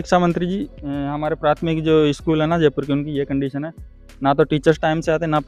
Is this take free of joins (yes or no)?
yes